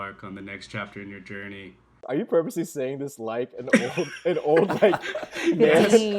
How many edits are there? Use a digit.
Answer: 1